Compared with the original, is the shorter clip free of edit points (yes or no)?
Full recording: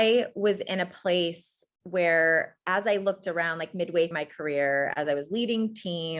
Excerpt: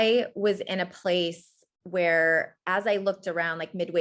yes